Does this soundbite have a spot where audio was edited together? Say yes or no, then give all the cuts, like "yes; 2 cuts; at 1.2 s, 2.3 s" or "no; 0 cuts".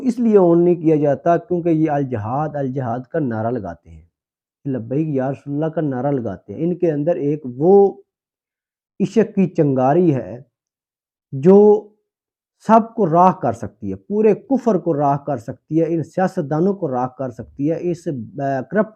no; 0 cuts